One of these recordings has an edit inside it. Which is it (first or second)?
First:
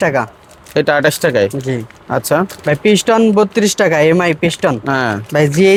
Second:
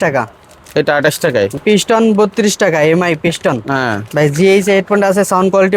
second